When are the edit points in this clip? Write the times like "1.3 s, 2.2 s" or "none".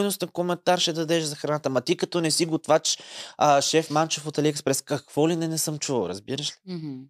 none